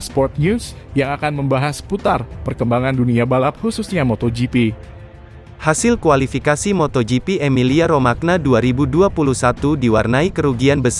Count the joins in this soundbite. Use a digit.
1